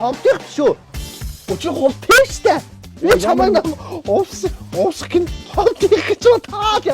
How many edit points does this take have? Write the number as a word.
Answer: one